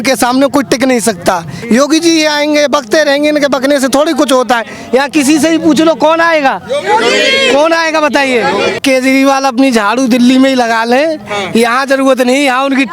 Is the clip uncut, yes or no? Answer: no